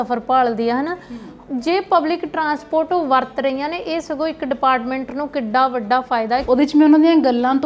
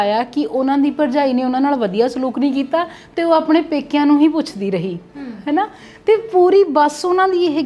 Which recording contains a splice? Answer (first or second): first